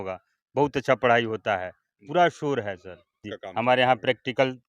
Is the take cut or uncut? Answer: cut